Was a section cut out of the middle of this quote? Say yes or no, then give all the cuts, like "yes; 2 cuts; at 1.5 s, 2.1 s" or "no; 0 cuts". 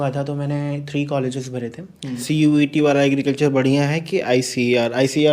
yes; 1 cut; at 2.2 s